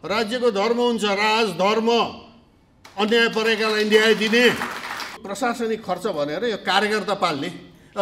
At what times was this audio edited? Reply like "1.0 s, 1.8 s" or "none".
5.2 s